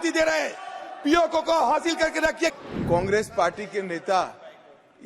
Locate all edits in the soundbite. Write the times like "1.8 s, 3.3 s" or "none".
2.6 s